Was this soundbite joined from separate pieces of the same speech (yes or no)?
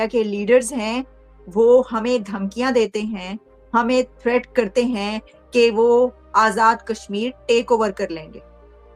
no